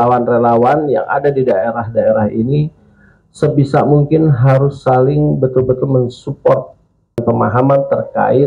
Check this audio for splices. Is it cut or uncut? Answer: cut